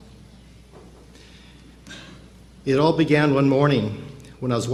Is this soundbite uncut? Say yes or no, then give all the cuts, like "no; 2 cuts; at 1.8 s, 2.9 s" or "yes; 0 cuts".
yes; 0 cuts